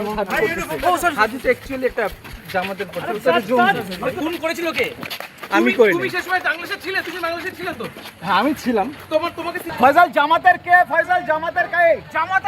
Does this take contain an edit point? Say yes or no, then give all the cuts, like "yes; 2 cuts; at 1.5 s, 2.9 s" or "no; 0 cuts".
yes; 1 cut; at 9.7 s